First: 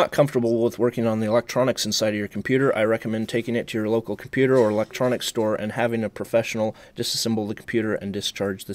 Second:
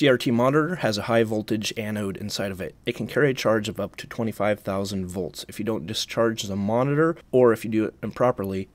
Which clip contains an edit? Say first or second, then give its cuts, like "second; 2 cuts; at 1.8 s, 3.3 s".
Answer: second; 1 cut; at 7.2 s